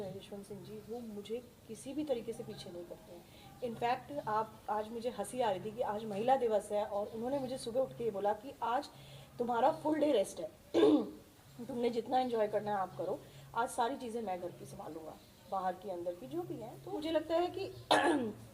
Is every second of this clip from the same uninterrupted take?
no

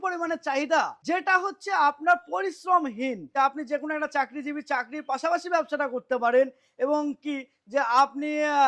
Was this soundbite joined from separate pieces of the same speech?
yes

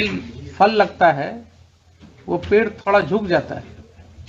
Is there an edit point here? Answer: no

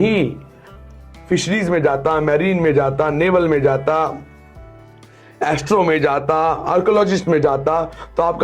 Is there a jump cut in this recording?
no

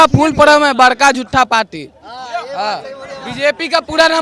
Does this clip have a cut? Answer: no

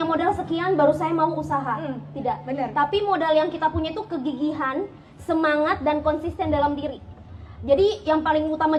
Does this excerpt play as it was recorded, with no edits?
yes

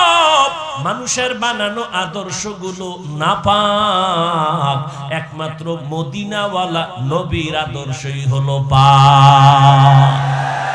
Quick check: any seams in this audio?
no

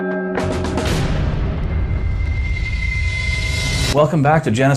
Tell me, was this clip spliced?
no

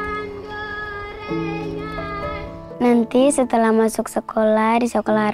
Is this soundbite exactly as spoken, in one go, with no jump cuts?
no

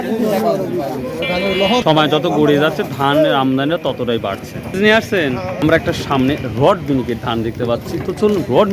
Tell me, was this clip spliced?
no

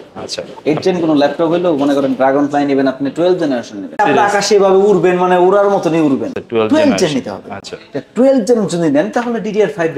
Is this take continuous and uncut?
no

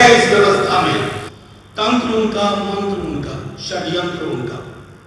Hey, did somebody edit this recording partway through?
yes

